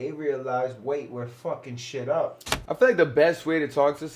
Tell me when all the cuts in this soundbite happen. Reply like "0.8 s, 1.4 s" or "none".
2.5 s